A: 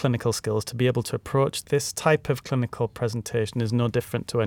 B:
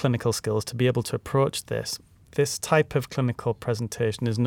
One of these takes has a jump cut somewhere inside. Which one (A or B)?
A